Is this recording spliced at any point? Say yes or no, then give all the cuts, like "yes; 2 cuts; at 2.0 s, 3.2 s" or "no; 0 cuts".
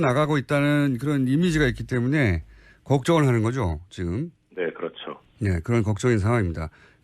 yes; 1 cut; at 5.2 s